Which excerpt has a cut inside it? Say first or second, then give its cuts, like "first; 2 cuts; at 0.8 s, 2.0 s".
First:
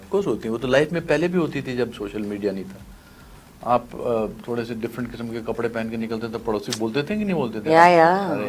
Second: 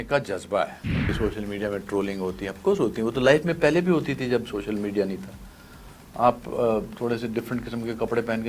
second; 1 cut; at 1.1 s